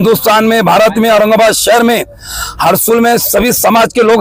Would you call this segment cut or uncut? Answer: uncut